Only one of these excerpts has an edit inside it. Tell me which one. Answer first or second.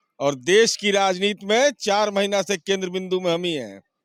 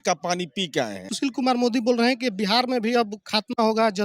second